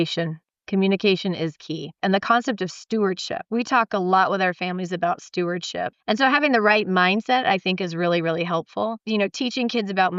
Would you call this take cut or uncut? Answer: cut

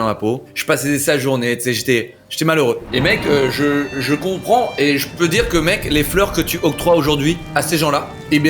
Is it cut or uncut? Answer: uncut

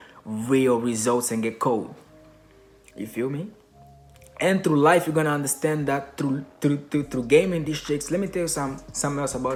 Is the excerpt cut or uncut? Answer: uncut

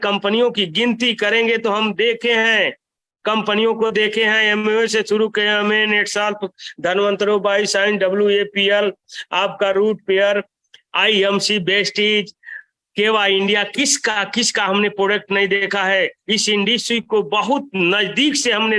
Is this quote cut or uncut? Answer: uncut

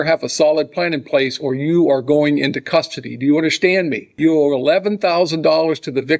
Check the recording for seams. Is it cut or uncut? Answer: cut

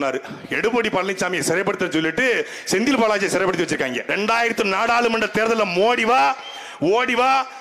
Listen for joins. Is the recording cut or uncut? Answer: cut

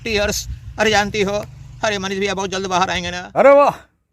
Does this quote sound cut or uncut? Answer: cut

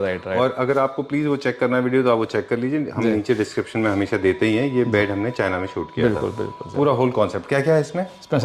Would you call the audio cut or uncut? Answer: uncut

